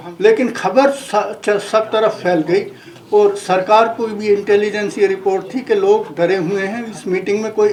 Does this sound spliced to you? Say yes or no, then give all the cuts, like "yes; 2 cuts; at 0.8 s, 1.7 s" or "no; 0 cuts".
no; 0 cuts